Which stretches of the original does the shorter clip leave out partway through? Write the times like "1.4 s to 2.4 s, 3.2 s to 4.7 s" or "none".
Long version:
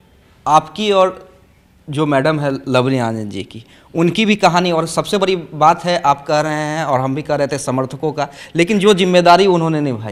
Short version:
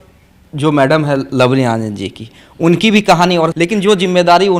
4.9 s to 8.5 s